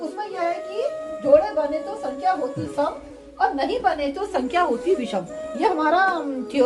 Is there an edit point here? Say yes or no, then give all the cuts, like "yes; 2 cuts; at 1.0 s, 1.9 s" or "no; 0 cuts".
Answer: no; 0 cuts